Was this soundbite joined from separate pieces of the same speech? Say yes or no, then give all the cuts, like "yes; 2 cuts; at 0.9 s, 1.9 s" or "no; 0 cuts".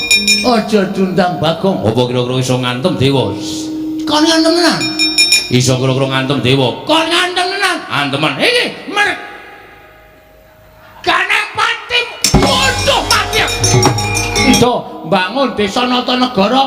yes; 1 cut; at 14.5 s